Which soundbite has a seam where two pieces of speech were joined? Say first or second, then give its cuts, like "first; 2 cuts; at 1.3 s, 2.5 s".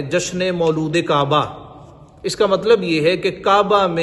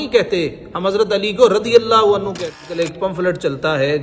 second; 1 cut; at 2.7 s